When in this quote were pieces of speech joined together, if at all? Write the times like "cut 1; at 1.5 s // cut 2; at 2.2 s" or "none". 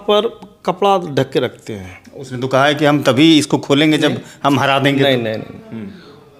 none